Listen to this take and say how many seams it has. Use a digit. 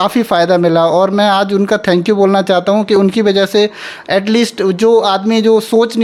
0